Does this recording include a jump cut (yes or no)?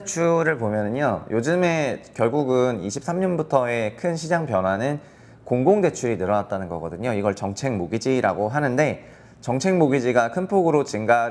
no